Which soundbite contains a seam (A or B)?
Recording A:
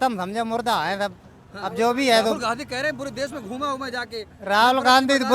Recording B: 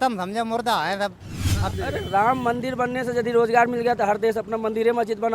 B